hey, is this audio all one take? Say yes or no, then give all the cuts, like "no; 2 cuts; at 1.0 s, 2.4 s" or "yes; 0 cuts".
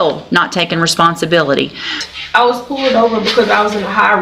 no; 1 cut; at 2.0 s